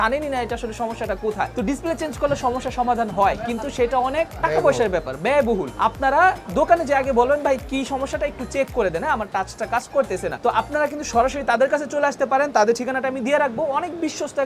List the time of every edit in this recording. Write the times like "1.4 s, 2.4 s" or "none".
none